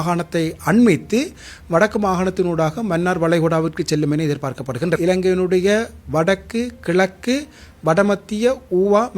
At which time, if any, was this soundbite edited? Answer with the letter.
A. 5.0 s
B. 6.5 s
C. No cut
A